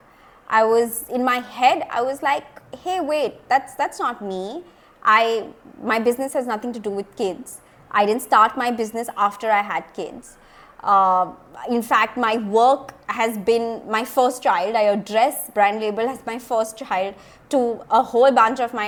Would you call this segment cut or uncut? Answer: uncut